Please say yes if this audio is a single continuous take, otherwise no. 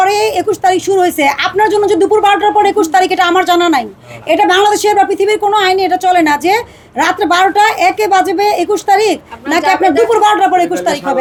yes